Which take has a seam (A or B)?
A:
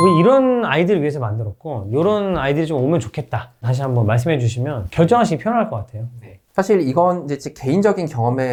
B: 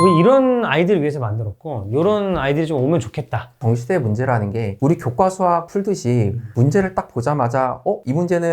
B